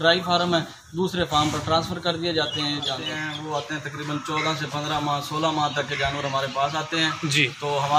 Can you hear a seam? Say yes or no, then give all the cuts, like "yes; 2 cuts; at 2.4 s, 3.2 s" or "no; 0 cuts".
yes; 1 cut; at 3.1 s